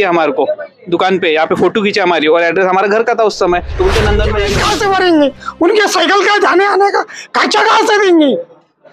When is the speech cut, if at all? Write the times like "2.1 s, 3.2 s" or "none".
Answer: 4.4 s